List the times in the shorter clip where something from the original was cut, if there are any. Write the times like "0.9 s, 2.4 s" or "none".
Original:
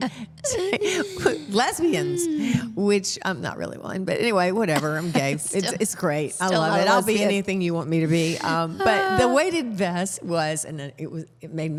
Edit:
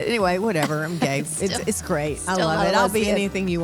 none